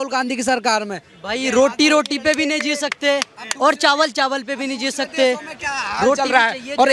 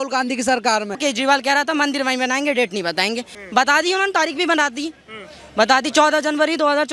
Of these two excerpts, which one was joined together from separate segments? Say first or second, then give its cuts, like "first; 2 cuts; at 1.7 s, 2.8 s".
second; 2 cuts; at 1.0 s, 3.3 s